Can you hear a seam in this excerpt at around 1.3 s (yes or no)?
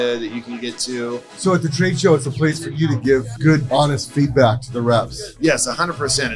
yes